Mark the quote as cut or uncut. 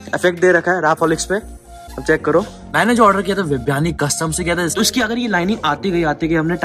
cut